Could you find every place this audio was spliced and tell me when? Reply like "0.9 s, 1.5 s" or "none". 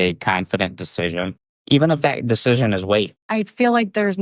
3.3 s